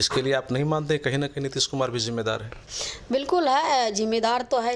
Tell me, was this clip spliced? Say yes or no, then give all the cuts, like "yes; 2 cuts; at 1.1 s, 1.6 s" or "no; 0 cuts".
no; 0 cuts